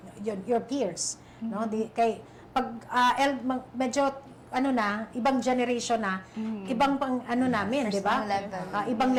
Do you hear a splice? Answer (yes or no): no